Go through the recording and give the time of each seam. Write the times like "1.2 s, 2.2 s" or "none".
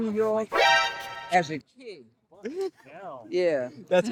none